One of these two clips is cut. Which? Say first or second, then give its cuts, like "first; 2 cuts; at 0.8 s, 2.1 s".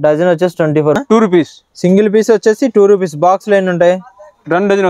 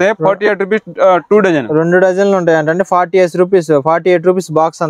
first; 1 cut; at 1.0 s